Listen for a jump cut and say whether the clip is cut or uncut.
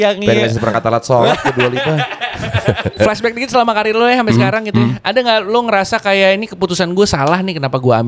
cut